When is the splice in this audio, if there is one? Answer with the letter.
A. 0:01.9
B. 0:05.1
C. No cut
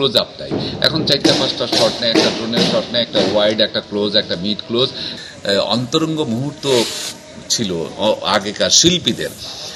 B